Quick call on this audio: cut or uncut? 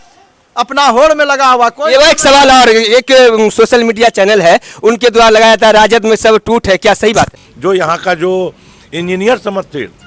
cut